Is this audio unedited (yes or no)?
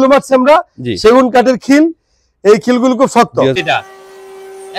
no